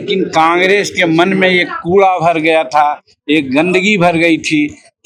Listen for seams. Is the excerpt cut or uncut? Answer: uncut